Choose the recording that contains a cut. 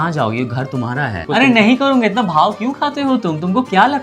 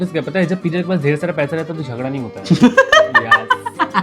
first; 1 cut; at 1.2 s

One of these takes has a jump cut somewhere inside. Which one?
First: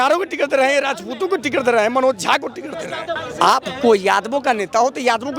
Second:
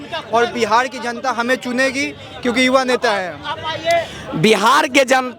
first; 1 cut; at 3.1 s

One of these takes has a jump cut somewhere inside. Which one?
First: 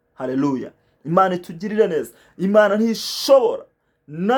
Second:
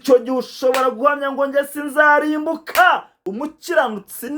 second; 1 cut; at 3.2 s

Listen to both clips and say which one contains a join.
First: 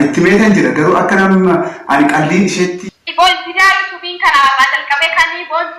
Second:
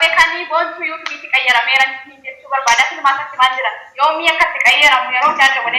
first; 1 cut; at 2.8 s

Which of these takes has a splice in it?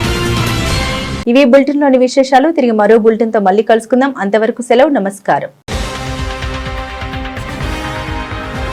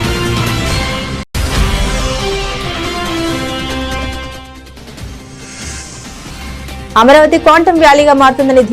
second; 2 cuts; at 1.2 s, 6.9 s

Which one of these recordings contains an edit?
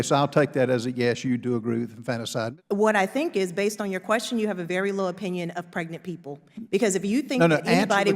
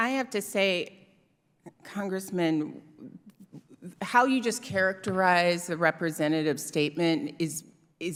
first; 1 cut; at 2.5 s

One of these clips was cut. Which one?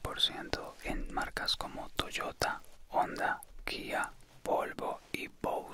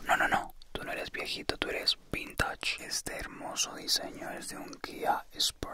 second; 1 cut; at 2.8 s

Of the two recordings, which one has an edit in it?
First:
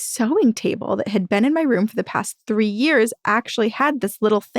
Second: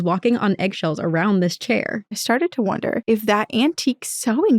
second; 2 cuts; at 2.2 s, 3.0 s

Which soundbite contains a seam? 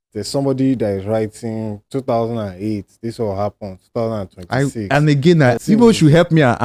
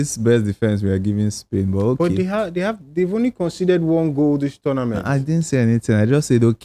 first; 1 cut; at 5.6 s

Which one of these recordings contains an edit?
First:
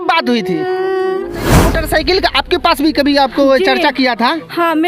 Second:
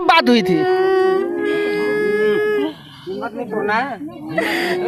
first; 1 cut; at 1.8 s

